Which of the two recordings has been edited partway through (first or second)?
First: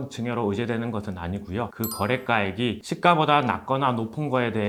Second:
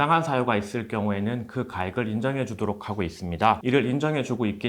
second